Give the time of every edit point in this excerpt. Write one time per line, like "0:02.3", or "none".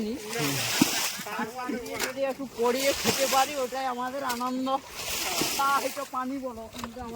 0:05.5